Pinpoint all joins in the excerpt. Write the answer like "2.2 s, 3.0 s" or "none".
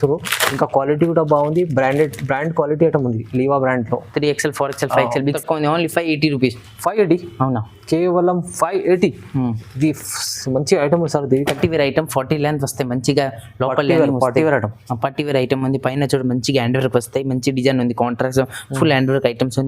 5.4 s, 11.6 s